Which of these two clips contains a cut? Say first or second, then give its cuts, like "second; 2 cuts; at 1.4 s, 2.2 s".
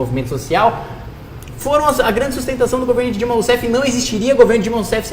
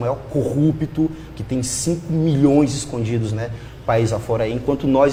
first; 1 cut; at 3.0 s